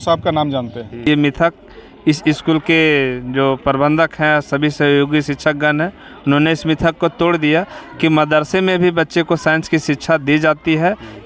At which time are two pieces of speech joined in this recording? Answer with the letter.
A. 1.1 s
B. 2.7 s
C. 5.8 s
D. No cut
A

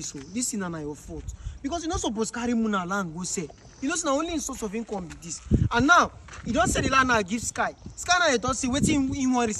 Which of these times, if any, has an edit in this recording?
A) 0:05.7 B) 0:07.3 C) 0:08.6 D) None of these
D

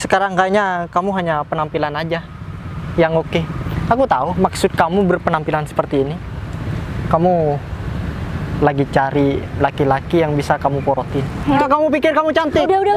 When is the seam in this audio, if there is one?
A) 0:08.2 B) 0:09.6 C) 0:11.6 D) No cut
C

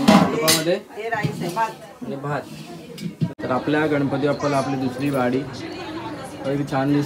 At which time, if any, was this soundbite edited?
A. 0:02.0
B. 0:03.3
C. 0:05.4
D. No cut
B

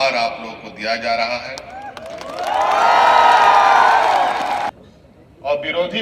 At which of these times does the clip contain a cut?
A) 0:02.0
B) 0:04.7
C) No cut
B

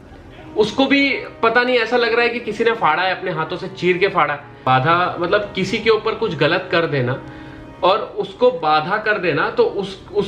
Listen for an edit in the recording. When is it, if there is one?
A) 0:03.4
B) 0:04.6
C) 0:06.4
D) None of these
B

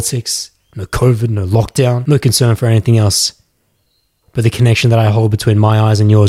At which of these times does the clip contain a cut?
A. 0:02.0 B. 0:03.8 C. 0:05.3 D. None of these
A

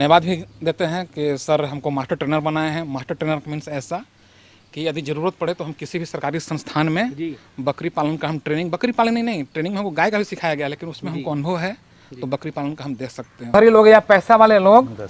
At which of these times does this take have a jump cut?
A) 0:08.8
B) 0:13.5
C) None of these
B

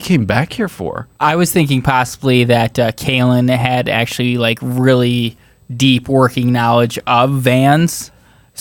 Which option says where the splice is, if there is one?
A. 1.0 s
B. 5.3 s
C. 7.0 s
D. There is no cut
A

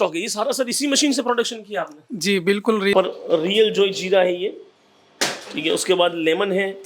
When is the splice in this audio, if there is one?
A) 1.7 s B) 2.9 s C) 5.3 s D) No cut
B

